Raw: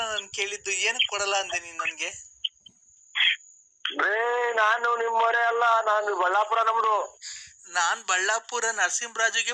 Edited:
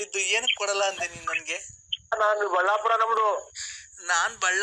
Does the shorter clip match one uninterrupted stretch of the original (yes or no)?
no